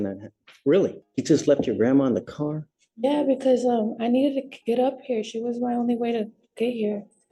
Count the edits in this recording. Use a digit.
1